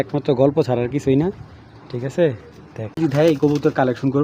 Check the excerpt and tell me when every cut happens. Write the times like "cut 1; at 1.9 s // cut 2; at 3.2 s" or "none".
cut 1; at 3.0 s